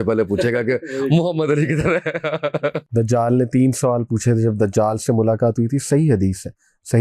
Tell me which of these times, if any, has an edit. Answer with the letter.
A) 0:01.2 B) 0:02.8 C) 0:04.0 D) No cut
B